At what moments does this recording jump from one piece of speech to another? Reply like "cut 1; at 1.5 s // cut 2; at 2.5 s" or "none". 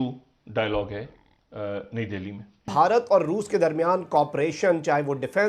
cut 1; at 2.7 s